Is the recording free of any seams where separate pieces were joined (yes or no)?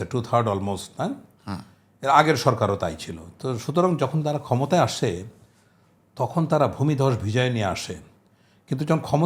yes